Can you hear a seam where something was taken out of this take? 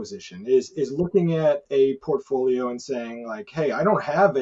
no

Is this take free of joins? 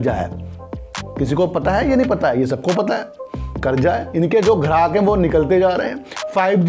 yes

